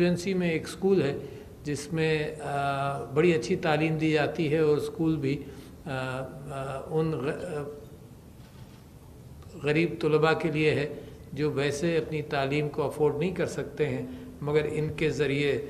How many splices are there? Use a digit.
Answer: 0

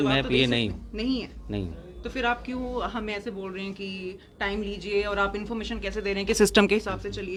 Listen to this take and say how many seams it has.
0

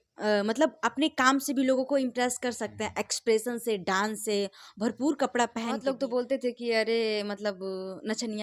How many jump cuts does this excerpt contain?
1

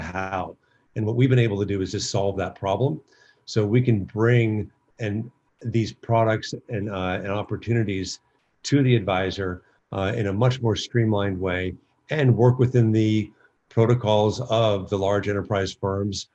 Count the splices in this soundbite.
0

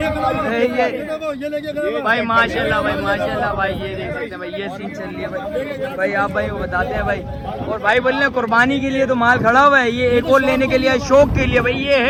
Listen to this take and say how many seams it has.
0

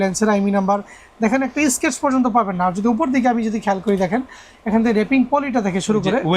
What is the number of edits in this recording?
0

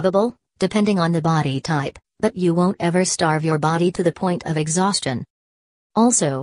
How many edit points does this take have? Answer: 1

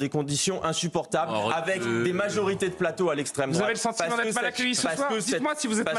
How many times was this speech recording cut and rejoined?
0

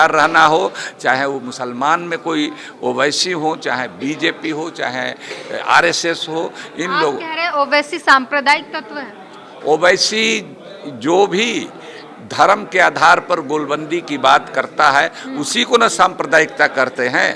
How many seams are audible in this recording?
0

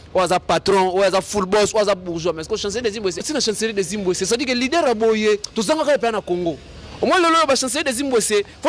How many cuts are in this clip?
1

